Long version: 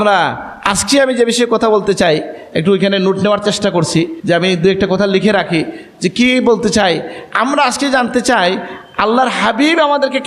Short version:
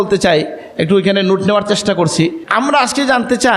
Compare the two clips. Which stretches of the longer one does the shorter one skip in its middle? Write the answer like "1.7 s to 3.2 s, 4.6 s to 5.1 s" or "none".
4.2 s to 7.2 s